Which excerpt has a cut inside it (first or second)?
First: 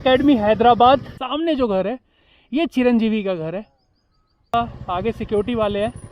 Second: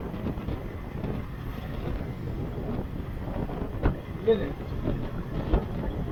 first